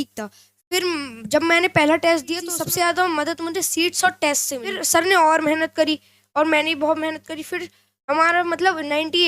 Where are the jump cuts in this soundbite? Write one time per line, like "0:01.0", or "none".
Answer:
0:02.6
0:04.8